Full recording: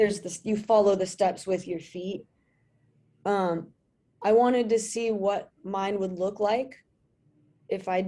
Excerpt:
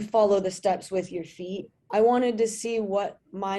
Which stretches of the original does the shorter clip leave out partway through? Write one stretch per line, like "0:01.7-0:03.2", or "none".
0:02.3-0:04.0